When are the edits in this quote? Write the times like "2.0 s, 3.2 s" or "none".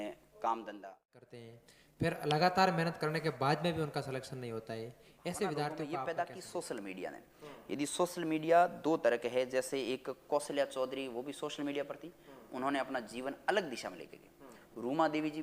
1.2 s, 6.1 s